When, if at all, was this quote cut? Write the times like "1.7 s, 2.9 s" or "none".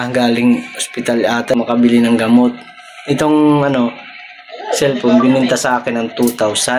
1.5 s